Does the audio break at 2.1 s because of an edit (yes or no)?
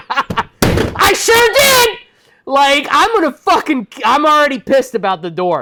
no